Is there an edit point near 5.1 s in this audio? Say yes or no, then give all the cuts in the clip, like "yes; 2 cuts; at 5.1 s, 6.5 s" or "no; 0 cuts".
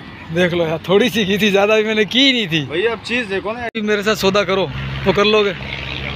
no; 1 cut; at 3.8 s